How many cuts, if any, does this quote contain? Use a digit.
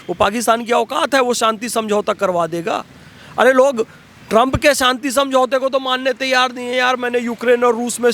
0